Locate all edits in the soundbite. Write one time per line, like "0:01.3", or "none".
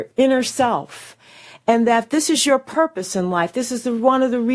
none